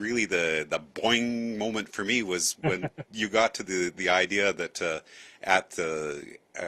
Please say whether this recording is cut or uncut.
uncut